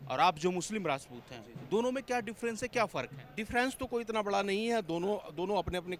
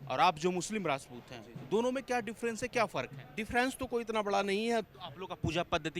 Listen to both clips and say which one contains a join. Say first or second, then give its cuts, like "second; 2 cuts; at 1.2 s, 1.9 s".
second; 1 cut; at 4.9 s